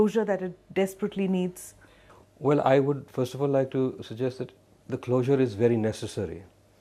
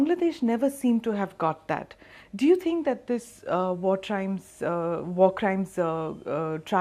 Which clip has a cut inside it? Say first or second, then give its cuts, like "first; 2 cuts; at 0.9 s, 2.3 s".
second; 1 cut; at 5.0 s